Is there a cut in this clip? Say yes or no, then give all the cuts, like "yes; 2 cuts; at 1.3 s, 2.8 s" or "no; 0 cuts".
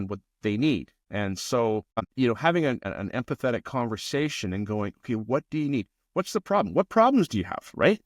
yes; 3 cuts; at 1.0 s, 2.0 s, 2.9 s